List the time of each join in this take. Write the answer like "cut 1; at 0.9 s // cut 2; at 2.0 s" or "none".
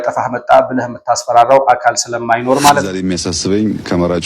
cut 1; at 2.9 s